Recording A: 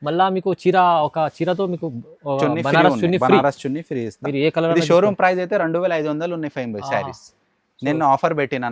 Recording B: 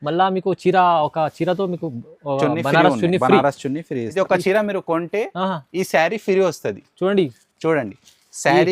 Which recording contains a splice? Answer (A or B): B